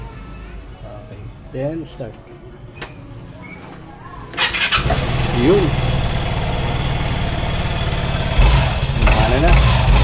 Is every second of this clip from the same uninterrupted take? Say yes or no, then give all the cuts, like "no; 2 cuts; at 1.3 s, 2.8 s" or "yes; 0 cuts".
yes; 0 cuts